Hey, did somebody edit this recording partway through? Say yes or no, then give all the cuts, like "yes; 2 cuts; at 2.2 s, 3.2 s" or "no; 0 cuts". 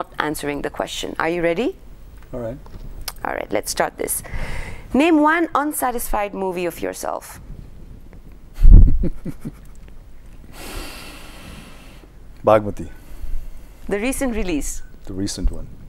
no; 0 cuts